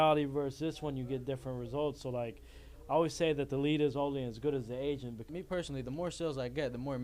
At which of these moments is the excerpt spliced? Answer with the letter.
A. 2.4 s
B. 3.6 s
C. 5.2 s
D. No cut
C